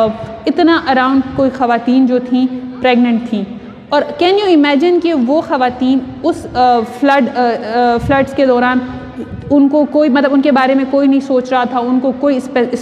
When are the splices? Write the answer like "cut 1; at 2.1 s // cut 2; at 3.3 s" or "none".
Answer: none